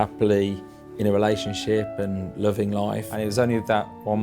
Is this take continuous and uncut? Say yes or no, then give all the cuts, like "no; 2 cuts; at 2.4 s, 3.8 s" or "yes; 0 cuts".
no; 1 cut; at 3.1 s